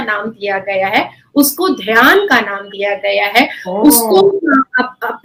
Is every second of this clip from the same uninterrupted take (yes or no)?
yes